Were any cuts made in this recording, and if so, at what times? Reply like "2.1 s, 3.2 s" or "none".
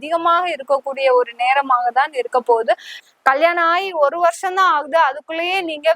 3.0 s